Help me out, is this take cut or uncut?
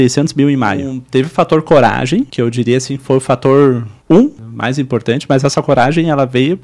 cut